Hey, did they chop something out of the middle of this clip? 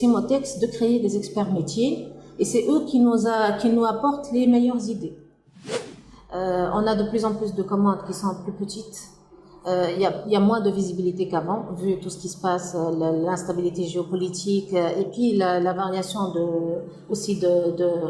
yes; 1 cut; at 5.5 s

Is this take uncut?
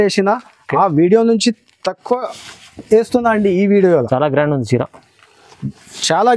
yes; 0 cuts

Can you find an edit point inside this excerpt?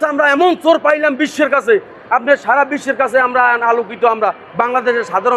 no; 0 cuts

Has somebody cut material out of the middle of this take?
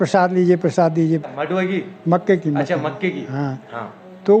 yes; 1 cut; at 1.3 s

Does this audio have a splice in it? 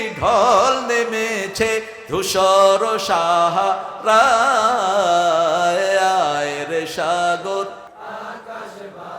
yes; 1 cut; at 7.9 s

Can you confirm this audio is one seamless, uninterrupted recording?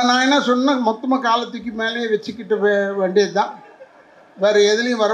yes; 0 cuts

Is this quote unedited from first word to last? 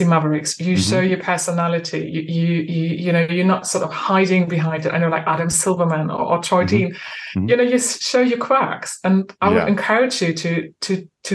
yes; 0 cuts

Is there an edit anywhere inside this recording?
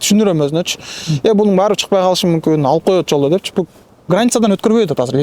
no; 0 cuts

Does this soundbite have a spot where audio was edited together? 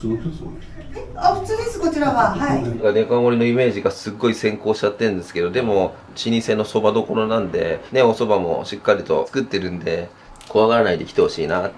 yes; 3 cuts; at 6.1 s, 7.8 s, 10.2 s

